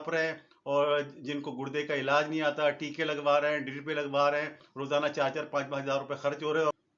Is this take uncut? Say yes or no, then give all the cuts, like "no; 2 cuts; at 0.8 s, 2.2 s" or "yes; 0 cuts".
no; 1 cut; at 4.6 s